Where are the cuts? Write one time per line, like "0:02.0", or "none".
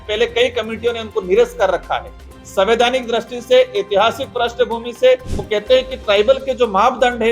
0:05.3